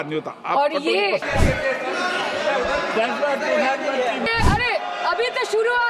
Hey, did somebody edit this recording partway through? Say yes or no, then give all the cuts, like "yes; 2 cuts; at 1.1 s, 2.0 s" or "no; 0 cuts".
yes; 2 cuts; at 1.2 s, 4.3 s